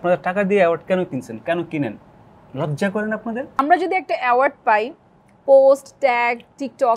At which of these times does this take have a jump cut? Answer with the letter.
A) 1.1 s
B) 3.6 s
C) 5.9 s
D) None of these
B